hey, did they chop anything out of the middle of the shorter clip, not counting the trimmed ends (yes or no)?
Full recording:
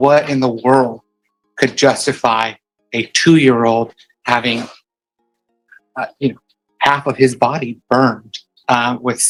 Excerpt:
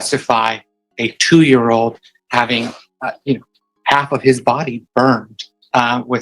yes